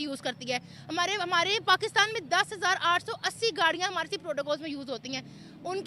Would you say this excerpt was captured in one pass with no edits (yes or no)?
yes